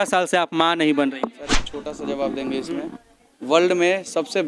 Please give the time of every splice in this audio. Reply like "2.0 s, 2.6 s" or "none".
1.7 s